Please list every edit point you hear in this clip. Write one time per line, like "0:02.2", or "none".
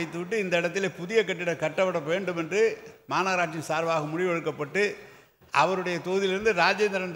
none